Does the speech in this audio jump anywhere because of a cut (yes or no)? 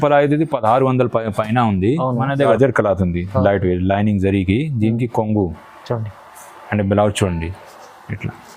yes